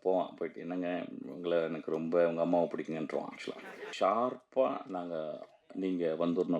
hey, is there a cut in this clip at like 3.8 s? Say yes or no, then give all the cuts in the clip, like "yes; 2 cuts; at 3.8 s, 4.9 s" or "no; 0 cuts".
yes; 1 cut; at 3.8 s